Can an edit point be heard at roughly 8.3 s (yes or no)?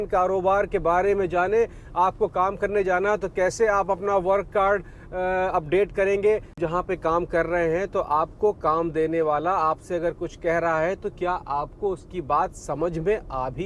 no